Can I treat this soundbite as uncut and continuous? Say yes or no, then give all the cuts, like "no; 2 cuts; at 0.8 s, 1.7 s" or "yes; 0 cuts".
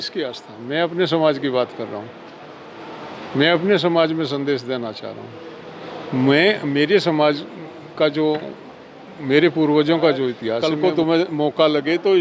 no; 1 cut; at 10.6 s